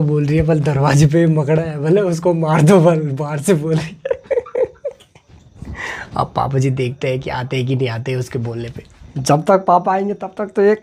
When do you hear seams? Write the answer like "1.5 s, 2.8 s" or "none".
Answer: none